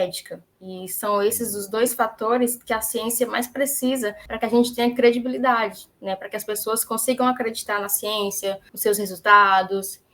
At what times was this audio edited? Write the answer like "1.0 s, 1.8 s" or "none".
4.2 s, 8.7 s